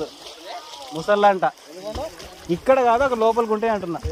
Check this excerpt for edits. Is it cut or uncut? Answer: uncut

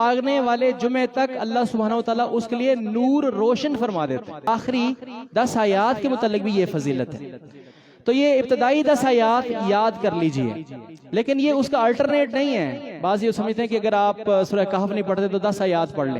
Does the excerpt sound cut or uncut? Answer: cut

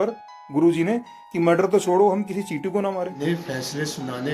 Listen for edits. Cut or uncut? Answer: cut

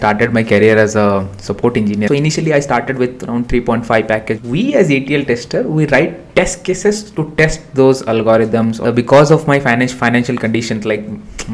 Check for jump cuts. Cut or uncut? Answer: cut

